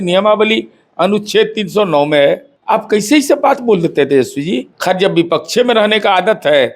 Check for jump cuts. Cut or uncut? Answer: cut